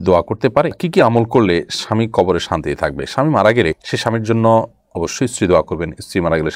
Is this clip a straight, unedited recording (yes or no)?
yes